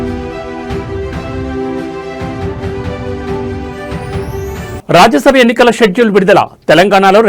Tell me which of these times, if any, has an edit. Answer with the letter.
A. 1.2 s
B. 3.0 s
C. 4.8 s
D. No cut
C